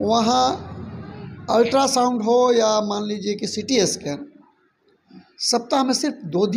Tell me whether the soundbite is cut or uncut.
uncut